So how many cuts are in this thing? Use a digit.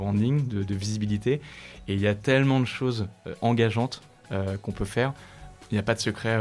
1